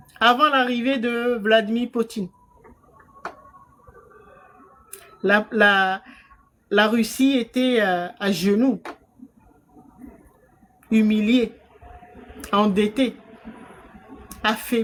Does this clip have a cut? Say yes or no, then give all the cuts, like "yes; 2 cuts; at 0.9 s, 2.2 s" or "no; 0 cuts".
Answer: no; 0 cuts